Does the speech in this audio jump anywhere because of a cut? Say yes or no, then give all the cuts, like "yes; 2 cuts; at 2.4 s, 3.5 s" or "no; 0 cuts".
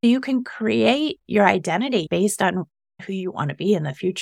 yes; 1 cut; at 2.1 s